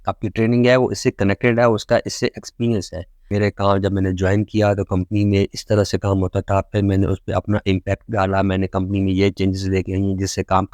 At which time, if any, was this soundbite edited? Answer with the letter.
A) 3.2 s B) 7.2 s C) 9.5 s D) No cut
A